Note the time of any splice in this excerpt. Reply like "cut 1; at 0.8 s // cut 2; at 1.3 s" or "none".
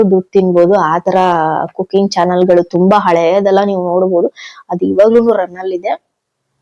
none